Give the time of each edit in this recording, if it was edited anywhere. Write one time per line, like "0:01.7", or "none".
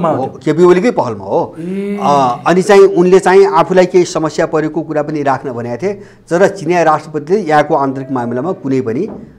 none